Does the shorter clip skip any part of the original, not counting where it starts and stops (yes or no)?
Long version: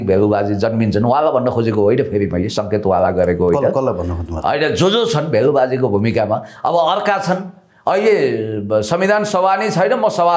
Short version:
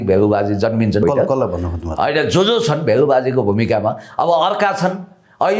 yes